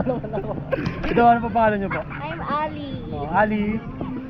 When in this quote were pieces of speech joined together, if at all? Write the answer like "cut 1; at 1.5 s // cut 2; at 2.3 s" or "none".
none